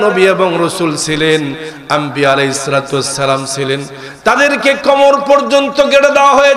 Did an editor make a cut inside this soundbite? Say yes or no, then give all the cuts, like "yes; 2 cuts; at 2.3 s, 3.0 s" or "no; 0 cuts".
no; 0 cuts